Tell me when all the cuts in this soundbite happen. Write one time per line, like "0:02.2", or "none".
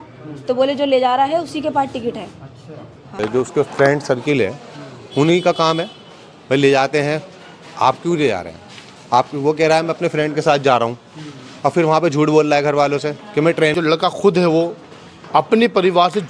0:03.1
0:13.7